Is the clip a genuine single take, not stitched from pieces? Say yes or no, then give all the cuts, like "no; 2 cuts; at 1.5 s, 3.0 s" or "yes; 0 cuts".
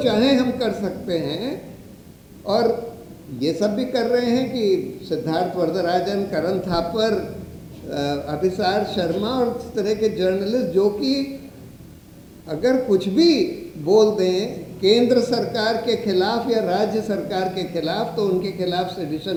yes; 0 cuts